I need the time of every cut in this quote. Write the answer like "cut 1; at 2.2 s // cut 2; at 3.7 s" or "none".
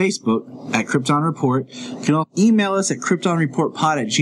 cut 1; at 2.3 s